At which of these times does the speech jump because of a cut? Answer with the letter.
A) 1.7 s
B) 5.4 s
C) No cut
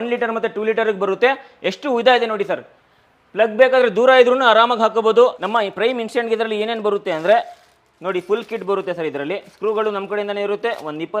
B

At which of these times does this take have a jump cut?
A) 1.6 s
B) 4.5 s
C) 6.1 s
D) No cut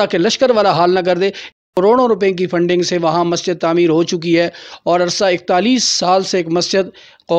A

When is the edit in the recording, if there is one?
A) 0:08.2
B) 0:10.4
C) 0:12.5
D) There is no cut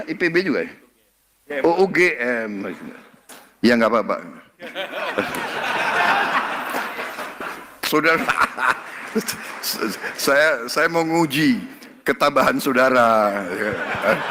A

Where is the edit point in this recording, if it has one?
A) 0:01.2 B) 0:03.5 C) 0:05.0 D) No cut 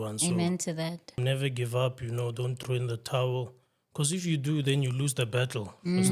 A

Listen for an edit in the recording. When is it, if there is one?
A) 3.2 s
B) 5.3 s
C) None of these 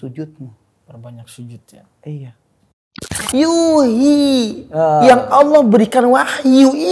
A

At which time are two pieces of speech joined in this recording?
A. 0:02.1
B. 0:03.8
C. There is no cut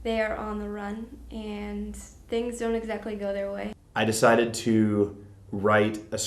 B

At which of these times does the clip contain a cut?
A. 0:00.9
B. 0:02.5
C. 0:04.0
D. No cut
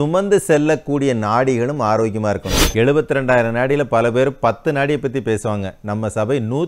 B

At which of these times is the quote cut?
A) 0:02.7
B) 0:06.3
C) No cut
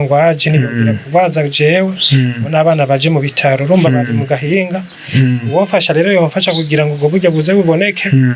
C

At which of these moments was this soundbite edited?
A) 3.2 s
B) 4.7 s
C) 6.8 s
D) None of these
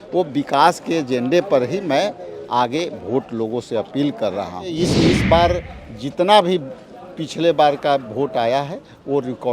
B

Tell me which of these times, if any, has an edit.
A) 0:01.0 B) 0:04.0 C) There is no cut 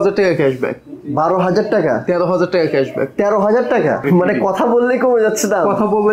B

